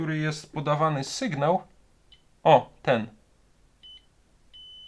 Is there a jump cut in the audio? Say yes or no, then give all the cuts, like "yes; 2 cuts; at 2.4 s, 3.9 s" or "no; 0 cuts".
no; 0 cuts